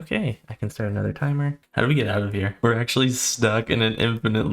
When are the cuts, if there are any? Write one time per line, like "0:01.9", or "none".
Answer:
0:01.6
0:02.5